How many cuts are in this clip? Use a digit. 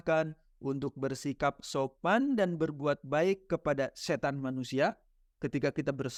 0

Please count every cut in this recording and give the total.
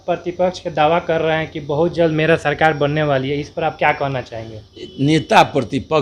0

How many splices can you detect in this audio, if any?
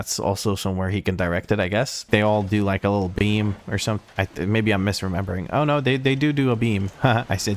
1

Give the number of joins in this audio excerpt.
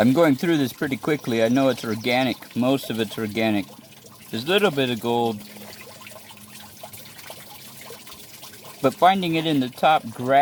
0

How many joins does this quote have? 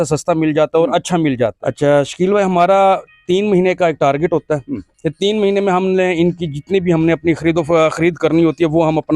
1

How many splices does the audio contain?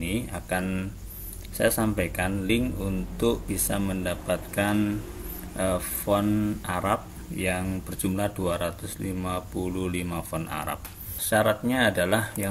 1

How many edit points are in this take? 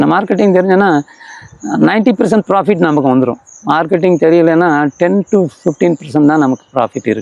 0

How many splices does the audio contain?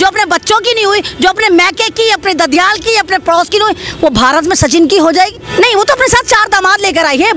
1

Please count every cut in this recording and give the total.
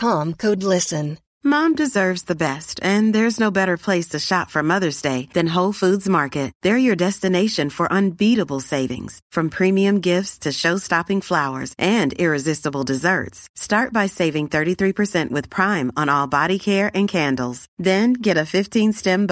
1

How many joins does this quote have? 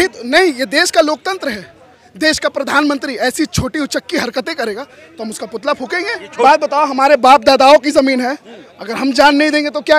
2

